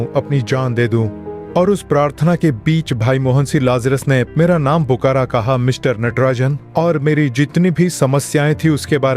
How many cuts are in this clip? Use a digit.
2